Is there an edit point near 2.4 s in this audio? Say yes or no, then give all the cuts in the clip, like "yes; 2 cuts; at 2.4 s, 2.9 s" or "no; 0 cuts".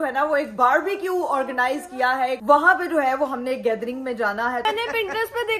yes; 2 cuts; at 2.4 s, 4.6 s